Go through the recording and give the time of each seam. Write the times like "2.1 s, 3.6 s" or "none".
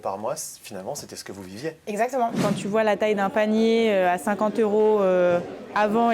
2.4 s